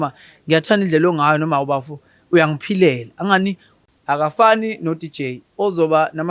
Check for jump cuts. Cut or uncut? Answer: cut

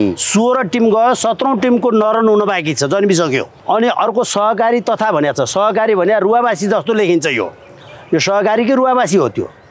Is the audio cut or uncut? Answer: cut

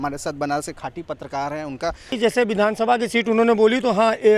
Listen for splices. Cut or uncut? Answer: cut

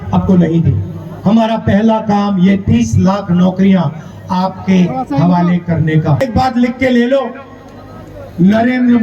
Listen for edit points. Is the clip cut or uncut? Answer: cut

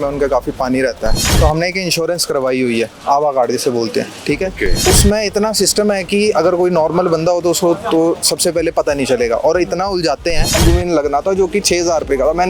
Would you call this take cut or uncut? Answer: cut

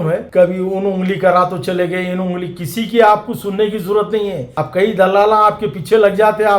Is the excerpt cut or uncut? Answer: uncut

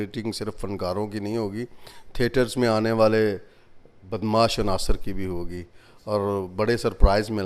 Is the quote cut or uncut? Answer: uncut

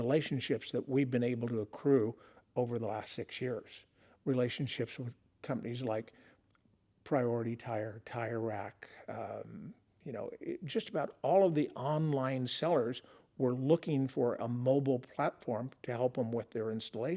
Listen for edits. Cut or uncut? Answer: uncut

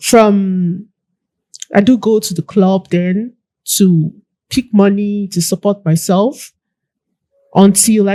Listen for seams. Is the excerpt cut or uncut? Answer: uncut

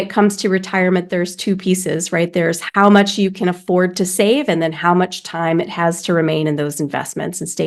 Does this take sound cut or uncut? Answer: uncut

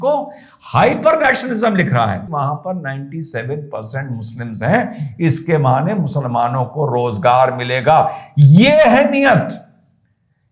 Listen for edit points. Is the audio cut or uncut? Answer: cut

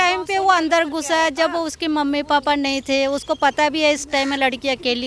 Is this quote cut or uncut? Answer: uncut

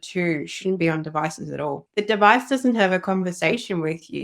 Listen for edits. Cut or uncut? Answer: cut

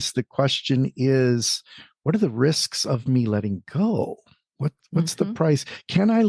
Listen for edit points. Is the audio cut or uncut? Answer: uncut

